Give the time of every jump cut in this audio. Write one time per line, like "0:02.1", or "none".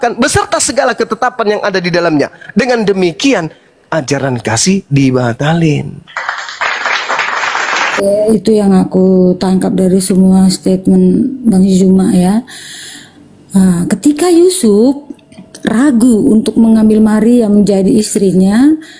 0:07.8